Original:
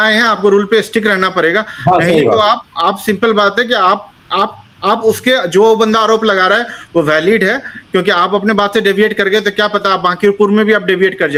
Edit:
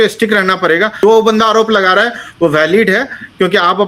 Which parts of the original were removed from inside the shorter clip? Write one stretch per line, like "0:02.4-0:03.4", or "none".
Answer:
0:01.7-0:05.5